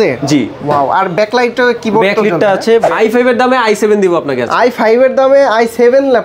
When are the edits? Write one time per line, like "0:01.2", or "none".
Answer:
0:02.9

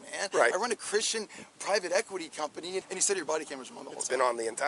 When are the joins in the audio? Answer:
0:02.8

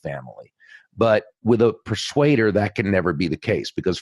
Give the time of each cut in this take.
0:01.3

